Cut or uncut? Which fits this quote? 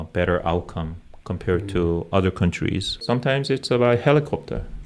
cut